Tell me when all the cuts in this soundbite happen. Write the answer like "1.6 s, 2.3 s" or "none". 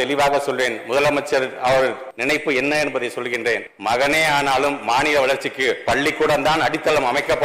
2.1 s, 3.7 s